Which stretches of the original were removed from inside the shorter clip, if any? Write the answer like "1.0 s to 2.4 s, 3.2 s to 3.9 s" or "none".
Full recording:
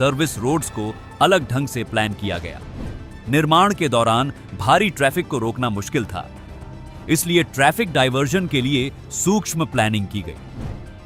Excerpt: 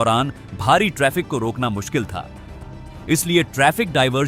none